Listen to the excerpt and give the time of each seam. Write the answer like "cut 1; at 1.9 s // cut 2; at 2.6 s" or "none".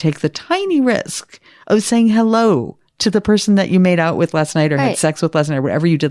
none

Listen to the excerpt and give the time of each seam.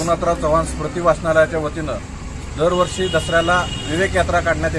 none

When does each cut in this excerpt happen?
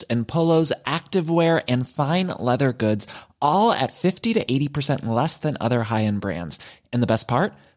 none

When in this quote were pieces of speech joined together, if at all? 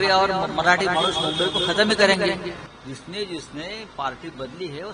cut 1; at 2.7 s

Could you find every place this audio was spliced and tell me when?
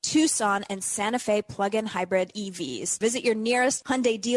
cut 1; at 2.9 s

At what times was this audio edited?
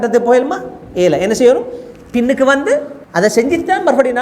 cut 1; at 3.0 s

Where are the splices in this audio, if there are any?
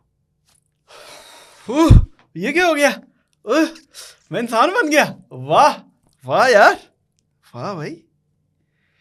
none

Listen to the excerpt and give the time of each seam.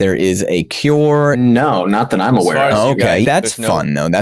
cut 1; at 1.4 s // cut 2; at 3.2 s

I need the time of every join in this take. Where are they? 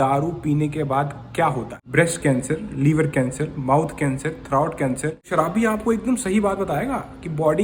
cut 1; at 1.8 s // cut 2; at 5.2 s

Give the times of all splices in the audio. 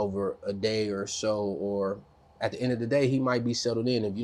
none

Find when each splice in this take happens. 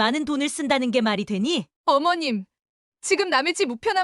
cut 1; at 1.7 s

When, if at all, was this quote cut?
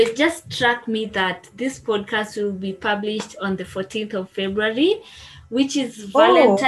none

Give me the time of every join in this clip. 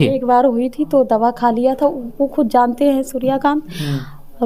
none

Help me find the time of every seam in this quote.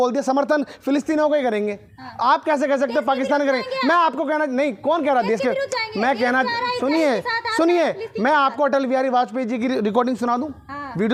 none

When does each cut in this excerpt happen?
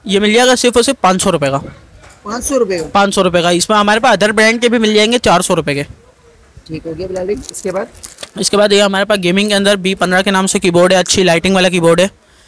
none

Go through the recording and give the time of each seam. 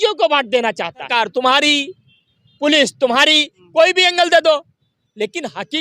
cut 1; at 1.1 s

